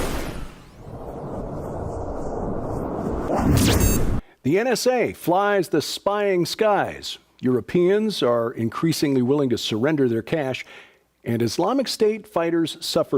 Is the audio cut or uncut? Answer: uncut